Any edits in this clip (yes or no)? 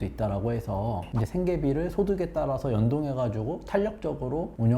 no